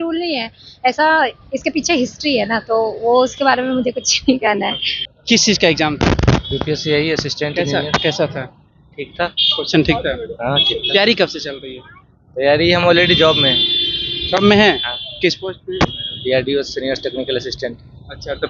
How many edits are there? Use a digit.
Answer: 0